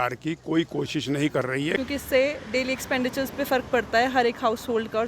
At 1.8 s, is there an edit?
yes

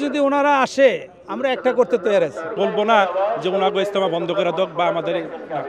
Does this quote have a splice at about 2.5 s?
yes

